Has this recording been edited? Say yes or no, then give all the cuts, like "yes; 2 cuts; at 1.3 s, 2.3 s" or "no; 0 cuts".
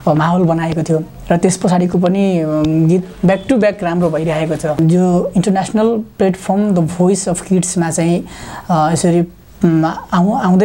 yes; 1 cut; at 4.8 s